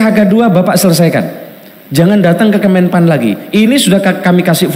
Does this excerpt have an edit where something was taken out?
no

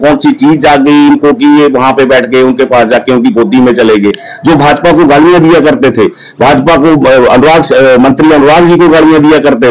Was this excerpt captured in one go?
yes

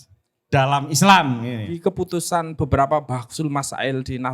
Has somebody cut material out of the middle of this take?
yes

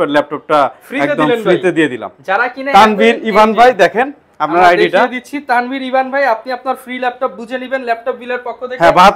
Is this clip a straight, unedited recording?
yes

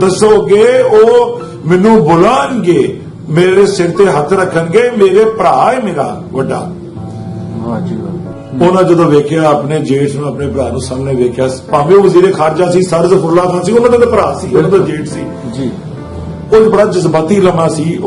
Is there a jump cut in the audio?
yes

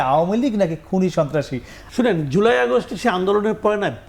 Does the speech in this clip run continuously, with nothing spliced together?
yes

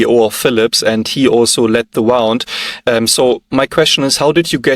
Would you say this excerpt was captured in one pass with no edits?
yes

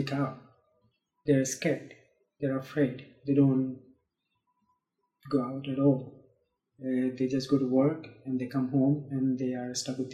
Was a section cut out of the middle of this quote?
no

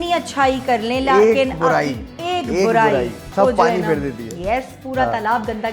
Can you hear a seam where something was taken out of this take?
yes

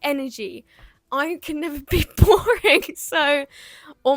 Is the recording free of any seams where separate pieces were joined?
yes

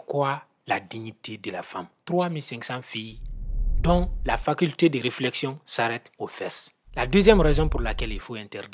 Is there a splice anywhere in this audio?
yes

